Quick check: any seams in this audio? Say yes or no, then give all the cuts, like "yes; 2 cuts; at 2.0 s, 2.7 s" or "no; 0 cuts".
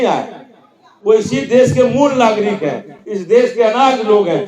no; 0 cuts